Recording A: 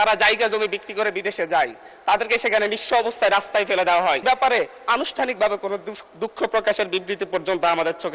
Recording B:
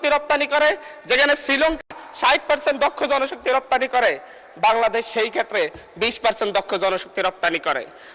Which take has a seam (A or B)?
A